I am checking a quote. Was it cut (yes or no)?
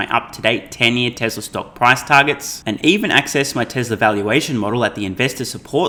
no